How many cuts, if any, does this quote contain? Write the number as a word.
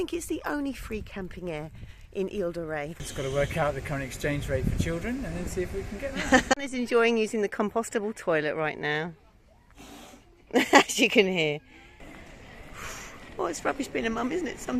three